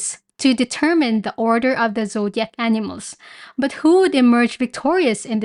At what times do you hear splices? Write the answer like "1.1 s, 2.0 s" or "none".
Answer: none